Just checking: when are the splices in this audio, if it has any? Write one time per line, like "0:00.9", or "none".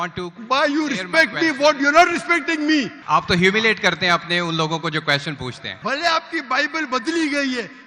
0:03.0
0:05.7